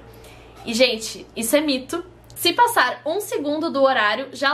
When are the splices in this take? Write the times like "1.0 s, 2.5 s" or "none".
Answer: 2.2 s